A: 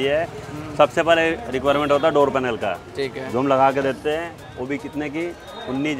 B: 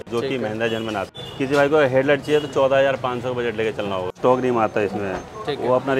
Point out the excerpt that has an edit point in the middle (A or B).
B